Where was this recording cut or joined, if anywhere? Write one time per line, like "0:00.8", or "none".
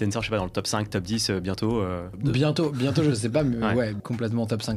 0:02.1
0:04.0